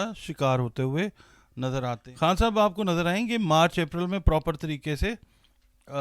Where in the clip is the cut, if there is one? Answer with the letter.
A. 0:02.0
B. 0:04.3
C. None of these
A